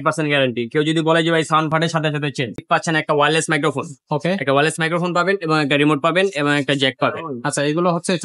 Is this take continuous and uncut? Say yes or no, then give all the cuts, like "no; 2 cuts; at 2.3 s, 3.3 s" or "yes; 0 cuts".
no; 1 cut; at 2.6 s